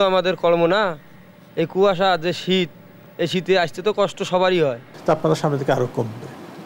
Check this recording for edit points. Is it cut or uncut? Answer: cut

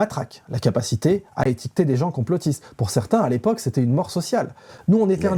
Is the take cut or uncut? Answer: uncut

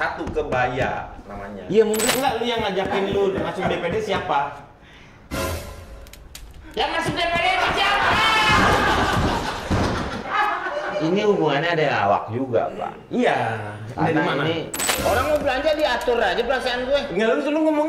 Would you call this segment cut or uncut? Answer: cut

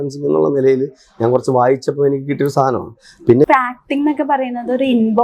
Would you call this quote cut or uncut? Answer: cut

